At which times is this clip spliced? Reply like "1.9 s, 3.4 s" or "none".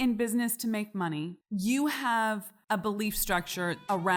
none